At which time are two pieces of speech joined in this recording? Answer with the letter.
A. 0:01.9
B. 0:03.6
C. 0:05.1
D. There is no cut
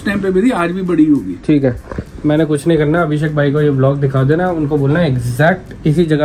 D